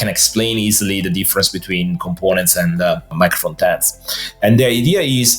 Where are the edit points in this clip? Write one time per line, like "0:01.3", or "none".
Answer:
0:03.1